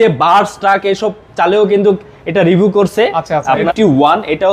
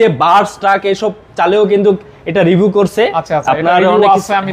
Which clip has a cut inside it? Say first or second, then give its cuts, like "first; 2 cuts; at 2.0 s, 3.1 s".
first; 1 cut; at 3.5 s